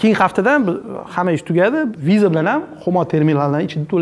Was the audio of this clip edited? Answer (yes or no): yes